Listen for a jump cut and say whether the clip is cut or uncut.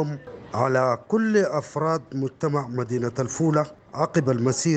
uncut